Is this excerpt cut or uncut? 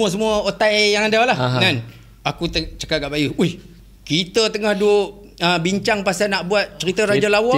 uncut